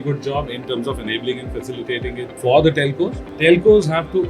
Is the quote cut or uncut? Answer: cut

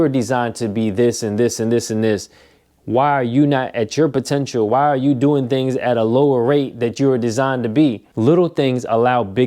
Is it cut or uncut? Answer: cut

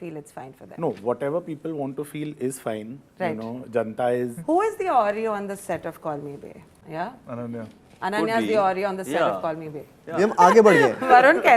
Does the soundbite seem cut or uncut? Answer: cut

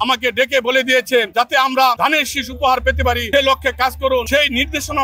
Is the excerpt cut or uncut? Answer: cut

